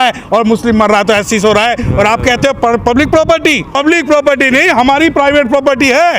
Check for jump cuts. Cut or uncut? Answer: uncut